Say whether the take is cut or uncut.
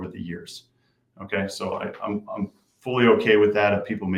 uncut